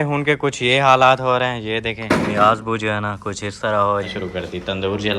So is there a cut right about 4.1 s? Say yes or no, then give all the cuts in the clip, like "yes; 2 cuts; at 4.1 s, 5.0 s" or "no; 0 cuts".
yes; 1 cut; at 4.1 s